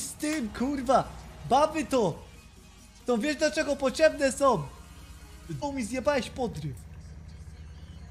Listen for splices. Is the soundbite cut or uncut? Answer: cut